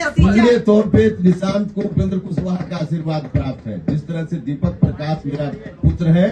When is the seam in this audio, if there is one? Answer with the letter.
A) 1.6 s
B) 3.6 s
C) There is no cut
C